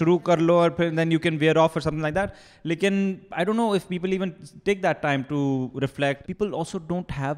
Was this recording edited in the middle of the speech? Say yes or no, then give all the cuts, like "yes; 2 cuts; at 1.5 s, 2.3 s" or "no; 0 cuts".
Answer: yes; 1 cut; at 6.2 s